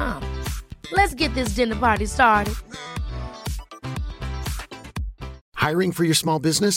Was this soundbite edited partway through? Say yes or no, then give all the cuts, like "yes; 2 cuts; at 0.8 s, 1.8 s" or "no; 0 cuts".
yes; 1 cut; at 5.4 s